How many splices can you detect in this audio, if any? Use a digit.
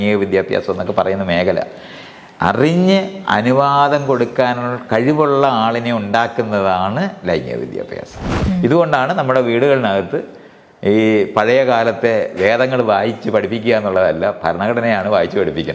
1